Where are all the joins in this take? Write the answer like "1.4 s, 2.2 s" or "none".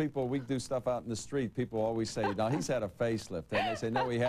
1.7 s